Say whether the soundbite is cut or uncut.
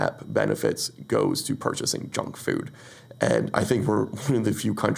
uncut